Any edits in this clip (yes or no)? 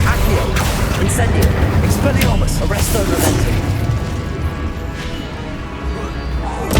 no